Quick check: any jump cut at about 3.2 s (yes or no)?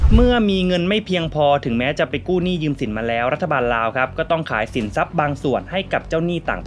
no